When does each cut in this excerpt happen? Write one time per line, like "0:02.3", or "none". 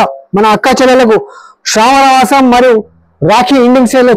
none